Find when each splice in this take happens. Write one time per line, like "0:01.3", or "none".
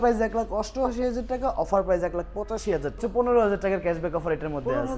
0:03.0